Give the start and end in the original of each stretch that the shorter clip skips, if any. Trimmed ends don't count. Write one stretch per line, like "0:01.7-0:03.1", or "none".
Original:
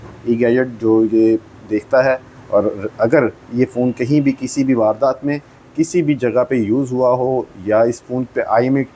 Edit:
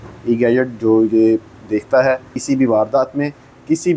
0:02.4-0:04.4